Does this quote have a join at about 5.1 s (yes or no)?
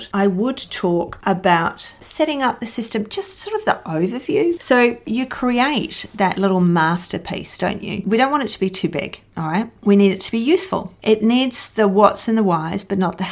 yes